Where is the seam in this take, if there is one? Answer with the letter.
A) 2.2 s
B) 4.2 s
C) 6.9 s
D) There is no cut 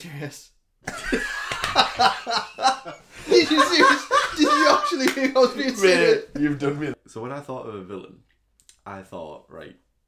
C